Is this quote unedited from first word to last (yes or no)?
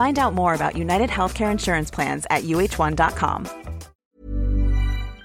no